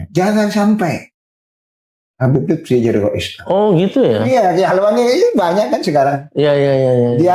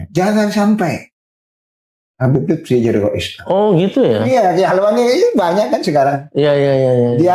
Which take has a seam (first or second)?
second